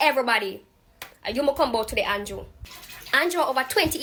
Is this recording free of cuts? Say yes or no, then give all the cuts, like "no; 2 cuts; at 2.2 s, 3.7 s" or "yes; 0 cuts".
yes; 0 cuts